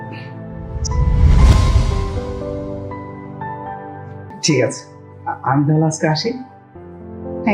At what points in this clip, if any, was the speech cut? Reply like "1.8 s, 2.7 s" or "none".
4.3 s